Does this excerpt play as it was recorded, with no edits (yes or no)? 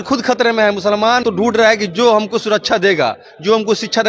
no